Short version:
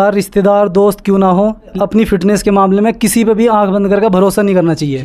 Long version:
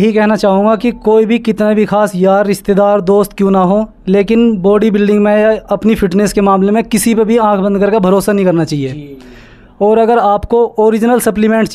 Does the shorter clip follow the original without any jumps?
no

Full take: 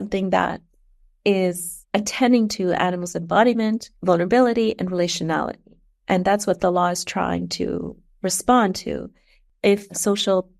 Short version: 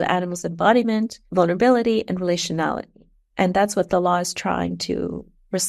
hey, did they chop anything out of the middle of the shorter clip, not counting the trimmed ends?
no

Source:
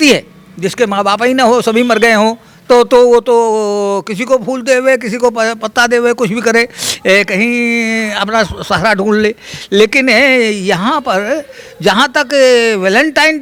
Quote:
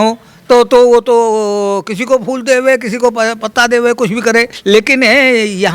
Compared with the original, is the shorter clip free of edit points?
no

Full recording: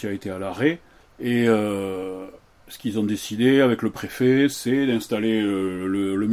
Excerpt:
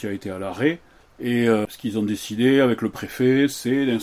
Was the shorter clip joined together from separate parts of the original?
yes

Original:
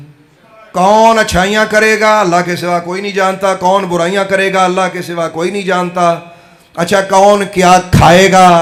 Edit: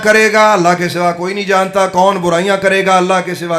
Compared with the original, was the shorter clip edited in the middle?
no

